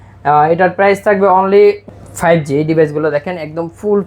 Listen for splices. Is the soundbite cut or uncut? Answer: cut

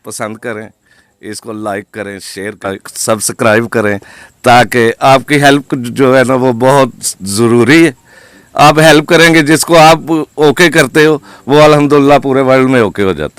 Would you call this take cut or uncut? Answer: cut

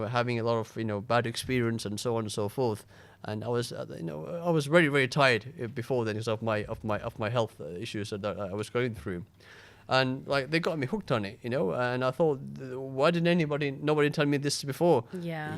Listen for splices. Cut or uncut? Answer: uncut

